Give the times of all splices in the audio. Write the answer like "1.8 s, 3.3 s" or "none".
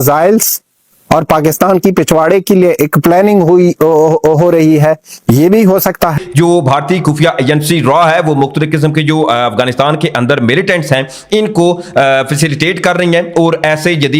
6.2 s